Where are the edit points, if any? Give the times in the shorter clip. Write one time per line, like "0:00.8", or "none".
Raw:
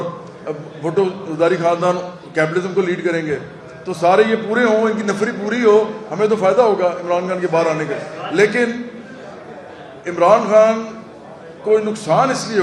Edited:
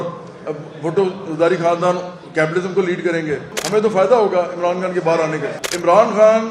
0:03.5
0:05.6